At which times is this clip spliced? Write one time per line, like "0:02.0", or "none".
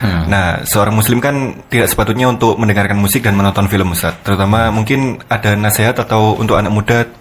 none